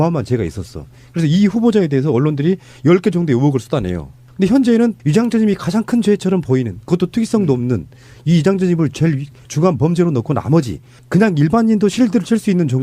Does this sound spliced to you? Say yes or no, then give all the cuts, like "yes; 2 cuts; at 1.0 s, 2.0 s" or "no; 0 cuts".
yes; 1 cut; at 9.2 s